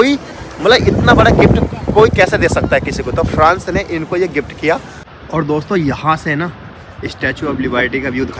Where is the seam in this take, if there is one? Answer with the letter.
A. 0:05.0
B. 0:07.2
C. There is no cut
A